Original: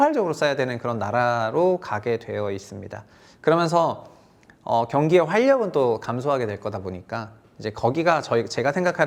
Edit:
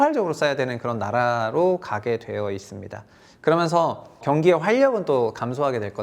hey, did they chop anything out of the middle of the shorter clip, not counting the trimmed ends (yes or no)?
yes